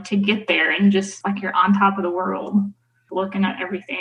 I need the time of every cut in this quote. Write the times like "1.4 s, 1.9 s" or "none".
3.1 s